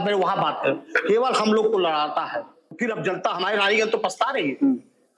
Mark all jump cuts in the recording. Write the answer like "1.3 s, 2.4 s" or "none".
2.8 s